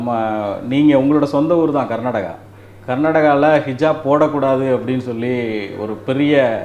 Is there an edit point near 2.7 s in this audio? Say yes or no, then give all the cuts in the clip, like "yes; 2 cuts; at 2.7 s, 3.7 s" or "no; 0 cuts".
no; 0 cuts